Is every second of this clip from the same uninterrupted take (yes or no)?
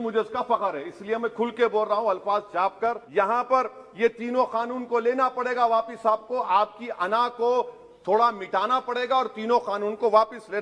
no